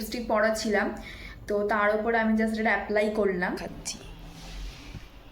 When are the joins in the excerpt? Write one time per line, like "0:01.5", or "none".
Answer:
0:03.6